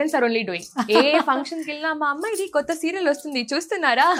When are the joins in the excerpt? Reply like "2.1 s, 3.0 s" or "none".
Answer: none